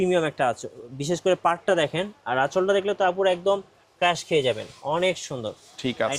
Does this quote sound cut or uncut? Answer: uncut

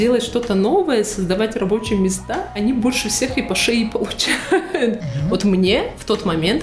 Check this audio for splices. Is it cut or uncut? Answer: cut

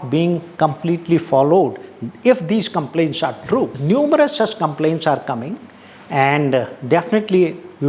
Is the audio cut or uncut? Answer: cut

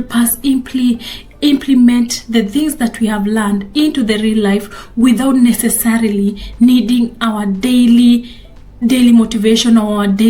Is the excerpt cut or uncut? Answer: uncut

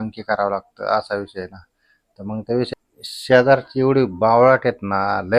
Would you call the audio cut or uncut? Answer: cut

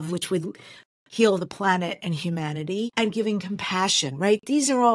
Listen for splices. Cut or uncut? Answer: cut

